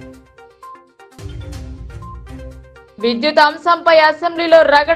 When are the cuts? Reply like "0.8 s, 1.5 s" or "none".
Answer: 1.2 s